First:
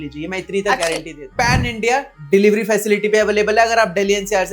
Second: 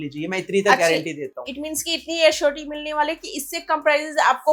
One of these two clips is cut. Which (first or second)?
first